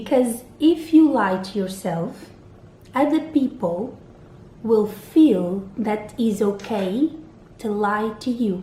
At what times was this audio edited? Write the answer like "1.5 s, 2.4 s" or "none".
none